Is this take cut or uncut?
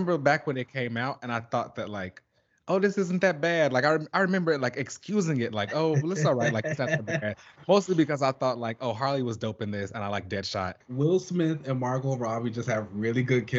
cut